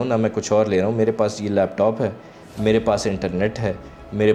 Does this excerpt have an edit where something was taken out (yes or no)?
no